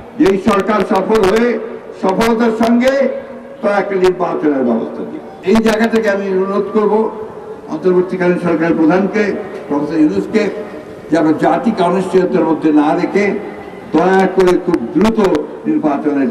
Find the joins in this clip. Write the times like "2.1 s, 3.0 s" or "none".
5.3 s

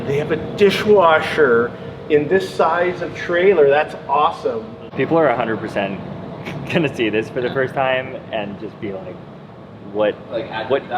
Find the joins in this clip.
4.8 s

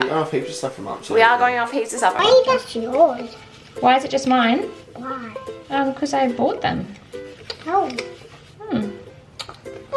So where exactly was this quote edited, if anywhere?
2.2 s

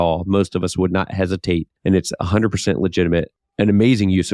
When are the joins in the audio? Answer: 1.7 s, 3.4 s

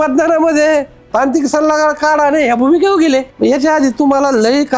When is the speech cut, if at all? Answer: 3.3 s

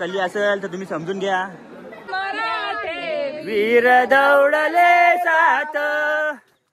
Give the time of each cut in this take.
2.1 s

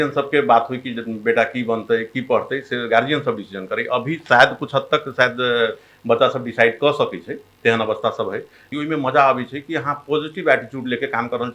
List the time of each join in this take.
8.7 s

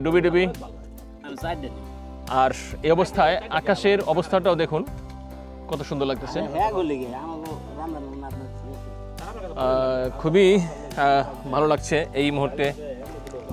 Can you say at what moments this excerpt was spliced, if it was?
none

